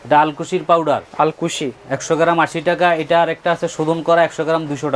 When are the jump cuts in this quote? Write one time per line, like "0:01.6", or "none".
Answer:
0:01.1